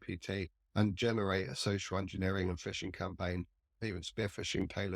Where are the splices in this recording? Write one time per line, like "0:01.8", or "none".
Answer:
0:03.8